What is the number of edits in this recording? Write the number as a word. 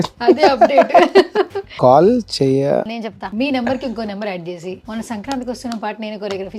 three